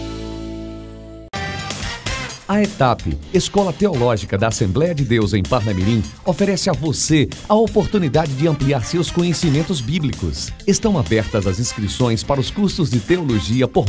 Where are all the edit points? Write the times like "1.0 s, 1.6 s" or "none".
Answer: 1.2 s